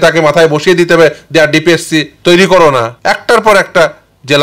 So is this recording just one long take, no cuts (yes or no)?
no